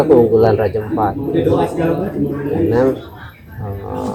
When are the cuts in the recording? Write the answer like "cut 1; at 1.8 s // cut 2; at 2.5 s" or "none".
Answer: none